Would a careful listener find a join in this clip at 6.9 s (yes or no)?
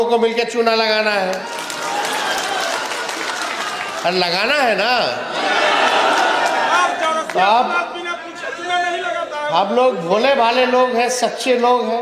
no